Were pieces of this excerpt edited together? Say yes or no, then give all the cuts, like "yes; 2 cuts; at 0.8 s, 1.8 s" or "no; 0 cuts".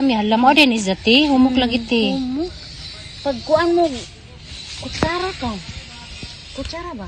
no; 0 cuts